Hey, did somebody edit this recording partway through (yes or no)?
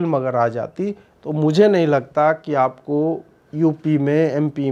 no